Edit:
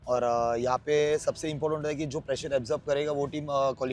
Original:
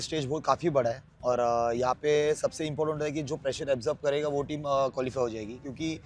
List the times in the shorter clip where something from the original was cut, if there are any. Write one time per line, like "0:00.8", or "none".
none